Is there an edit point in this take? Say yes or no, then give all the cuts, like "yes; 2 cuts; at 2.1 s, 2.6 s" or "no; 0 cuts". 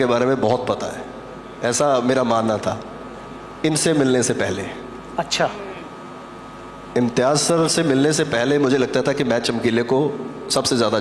no; 0 cuts